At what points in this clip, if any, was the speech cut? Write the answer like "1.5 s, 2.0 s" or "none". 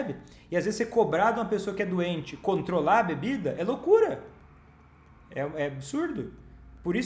none